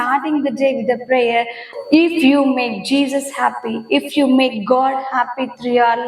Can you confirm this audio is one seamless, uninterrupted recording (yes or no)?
no